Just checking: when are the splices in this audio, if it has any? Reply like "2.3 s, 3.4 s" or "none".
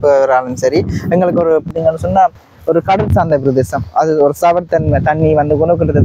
1.7 s